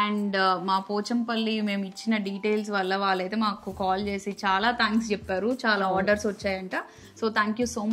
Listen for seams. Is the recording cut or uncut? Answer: uncut